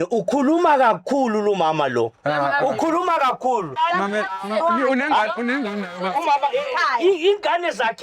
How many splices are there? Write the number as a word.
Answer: one